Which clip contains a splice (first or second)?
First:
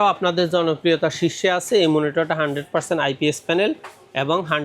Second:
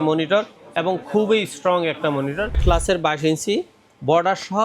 second